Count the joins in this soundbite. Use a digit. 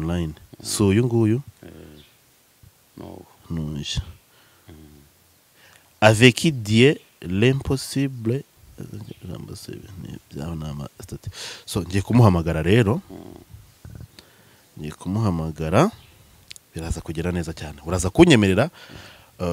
0